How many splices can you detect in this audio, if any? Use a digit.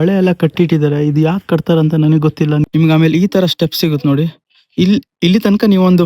1